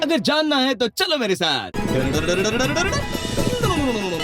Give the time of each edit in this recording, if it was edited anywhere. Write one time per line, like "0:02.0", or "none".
0:01.7